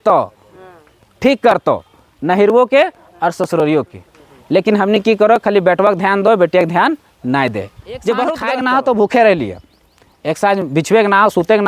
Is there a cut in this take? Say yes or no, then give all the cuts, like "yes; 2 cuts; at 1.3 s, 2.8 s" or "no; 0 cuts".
yes; 1 cut; at 8.4 s